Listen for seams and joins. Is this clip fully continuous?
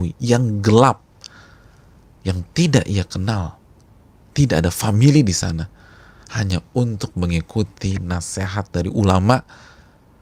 yes; 0 cuts

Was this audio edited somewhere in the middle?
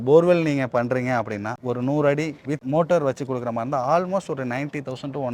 no; 0 cuts

